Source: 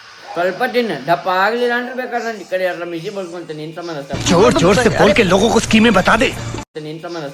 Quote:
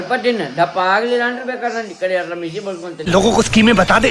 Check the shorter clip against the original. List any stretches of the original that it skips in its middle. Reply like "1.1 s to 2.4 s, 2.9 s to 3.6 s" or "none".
3.6 s to 5.3 s